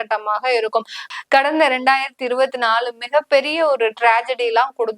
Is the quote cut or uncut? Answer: cut